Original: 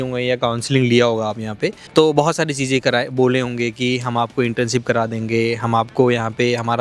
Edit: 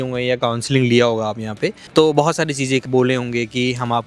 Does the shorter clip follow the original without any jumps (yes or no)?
no